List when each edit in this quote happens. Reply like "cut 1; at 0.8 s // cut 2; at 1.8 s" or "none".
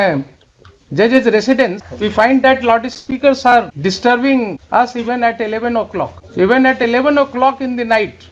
cut 1; at 1.8 s // cut 2; at 3.7 s // cut 3; at 4.6 s // cut 4; at 6.2 s